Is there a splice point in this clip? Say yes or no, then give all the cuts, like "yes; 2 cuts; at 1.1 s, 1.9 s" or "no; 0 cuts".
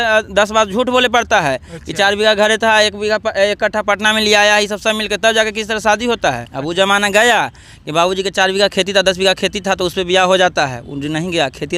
yes; 1 cut; at 6.5 s